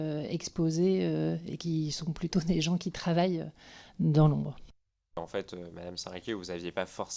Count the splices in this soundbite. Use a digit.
1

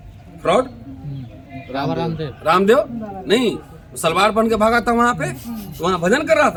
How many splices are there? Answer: 0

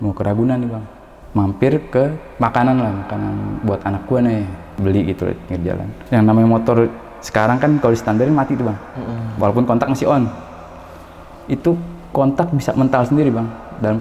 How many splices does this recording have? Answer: 1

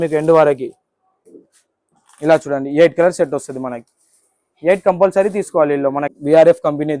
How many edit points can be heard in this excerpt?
2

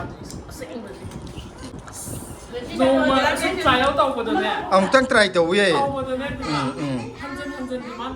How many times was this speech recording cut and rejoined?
1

